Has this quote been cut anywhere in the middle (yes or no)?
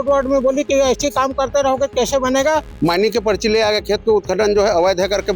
yes